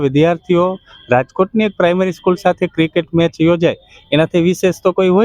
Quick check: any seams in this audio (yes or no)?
no